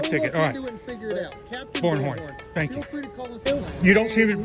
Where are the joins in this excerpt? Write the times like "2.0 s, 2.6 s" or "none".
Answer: 3.4 s